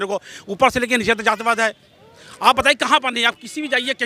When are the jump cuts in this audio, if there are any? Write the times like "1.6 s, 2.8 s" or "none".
none